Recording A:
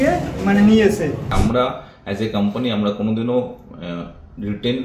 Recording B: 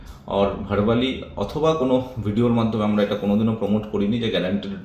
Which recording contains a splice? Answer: A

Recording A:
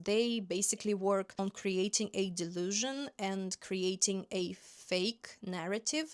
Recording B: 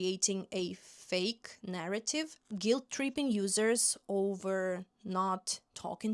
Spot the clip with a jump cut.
A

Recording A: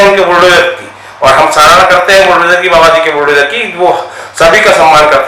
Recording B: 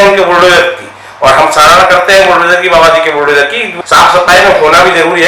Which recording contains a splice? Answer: B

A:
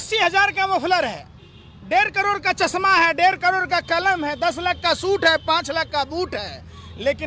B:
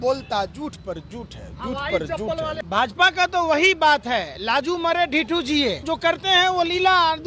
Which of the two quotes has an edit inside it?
B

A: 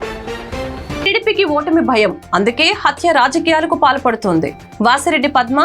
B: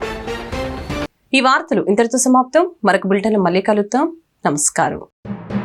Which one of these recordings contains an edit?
A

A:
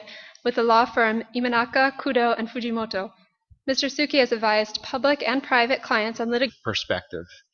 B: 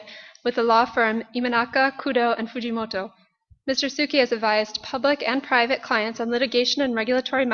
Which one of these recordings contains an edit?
B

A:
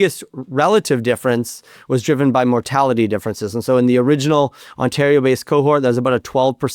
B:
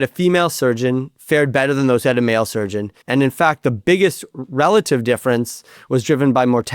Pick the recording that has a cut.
B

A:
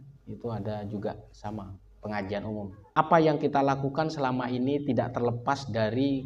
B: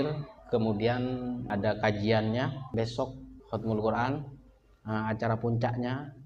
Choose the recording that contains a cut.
A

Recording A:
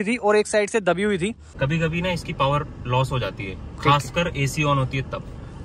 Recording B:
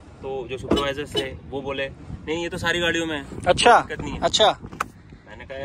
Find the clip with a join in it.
A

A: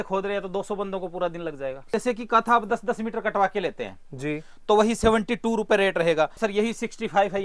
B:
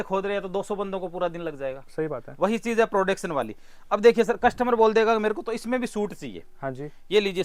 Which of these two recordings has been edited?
A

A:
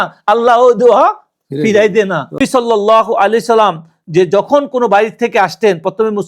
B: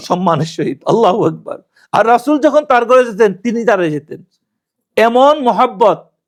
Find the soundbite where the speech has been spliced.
A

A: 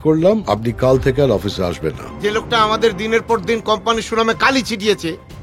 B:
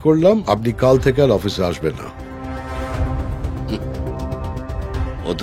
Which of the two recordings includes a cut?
A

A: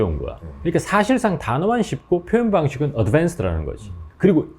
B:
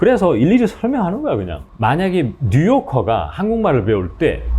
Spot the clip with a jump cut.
B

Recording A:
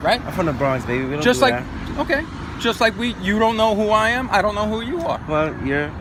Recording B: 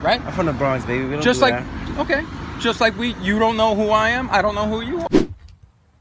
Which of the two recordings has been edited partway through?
B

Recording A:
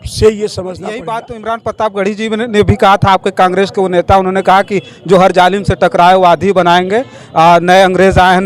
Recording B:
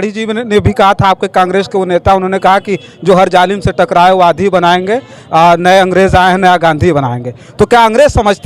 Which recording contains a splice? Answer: A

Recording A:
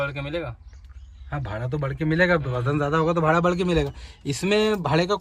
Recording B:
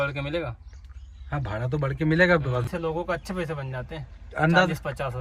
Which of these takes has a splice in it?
B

